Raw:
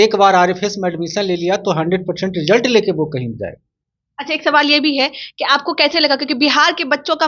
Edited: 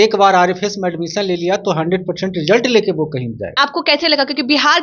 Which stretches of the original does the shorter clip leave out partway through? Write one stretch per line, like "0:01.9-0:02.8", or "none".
0:03.5-0:05.4